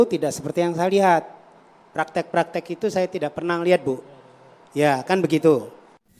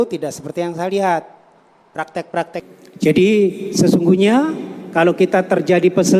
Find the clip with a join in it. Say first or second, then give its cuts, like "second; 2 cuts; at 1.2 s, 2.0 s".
second; 1 cut; at 2.6 s